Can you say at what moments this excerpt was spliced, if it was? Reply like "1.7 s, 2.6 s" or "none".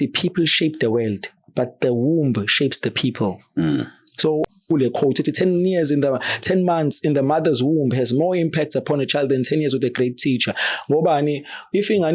4.4 s